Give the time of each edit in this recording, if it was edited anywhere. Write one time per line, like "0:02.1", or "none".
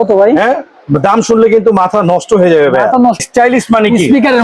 0:03.2